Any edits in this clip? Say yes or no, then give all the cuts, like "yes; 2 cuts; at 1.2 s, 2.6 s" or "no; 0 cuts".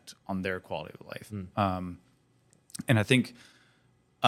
no; 0 cuts